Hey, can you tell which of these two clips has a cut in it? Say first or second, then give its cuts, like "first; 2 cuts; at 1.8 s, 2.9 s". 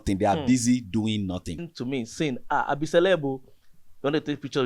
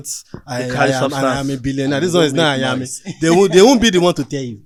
first; 1 cut; at 1.7 s